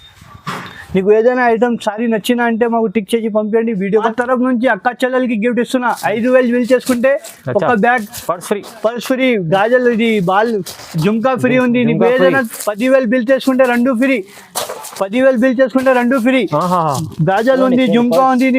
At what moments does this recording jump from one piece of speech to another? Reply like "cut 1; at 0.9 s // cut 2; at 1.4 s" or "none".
cut 1; at 4.1 s